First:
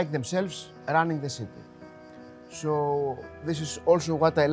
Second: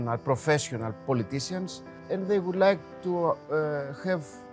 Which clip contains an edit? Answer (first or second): second